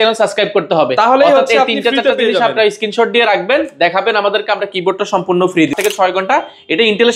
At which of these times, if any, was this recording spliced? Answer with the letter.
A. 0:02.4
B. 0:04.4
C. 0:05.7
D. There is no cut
C